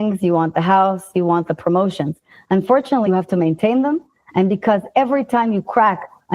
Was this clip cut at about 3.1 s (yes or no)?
yes